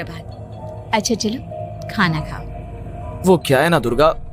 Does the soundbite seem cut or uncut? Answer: uncut